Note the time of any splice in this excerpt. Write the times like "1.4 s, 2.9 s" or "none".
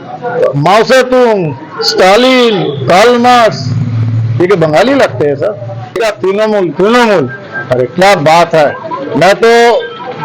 6.0 s